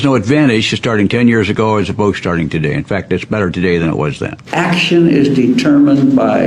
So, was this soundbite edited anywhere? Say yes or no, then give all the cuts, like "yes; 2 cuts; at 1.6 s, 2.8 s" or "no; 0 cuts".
yes; 1 cut; at 4.4 s